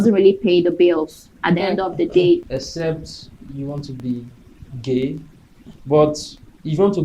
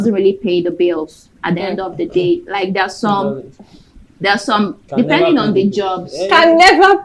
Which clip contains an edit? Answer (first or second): first